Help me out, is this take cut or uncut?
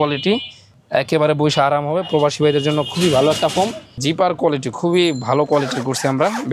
cut